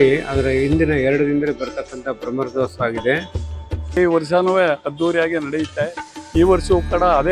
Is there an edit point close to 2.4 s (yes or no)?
no